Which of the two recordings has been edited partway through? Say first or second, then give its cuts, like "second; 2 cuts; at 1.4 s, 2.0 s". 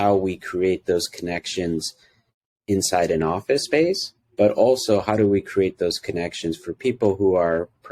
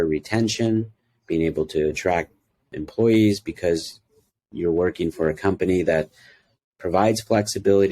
second; 1 cut; at 2.7 s